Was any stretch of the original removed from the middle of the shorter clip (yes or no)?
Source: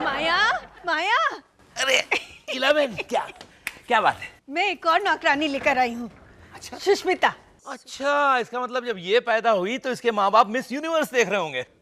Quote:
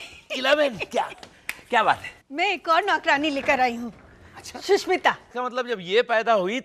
yes